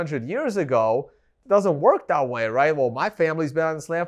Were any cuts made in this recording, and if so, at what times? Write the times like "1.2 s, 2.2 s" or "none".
1.3 s